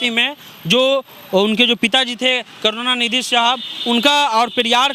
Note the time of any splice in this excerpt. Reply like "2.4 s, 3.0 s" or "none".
none